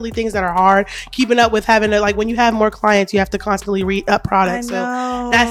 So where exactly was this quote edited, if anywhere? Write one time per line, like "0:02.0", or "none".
none